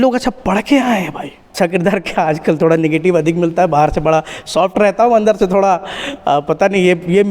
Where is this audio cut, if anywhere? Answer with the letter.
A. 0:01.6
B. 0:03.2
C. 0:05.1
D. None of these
A